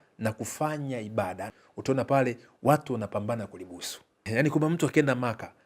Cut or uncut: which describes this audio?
cut